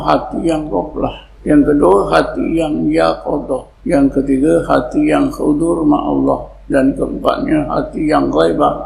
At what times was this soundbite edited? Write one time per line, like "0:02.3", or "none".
0:01.3
0:03.7
0:06.5